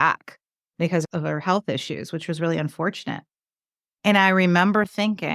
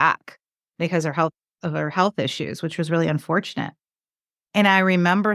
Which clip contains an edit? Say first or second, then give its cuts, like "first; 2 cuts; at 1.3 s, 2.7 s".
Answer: first; 1 cut; at 1.0 s